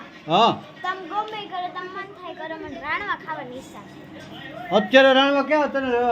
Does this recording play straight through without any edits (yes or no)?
yes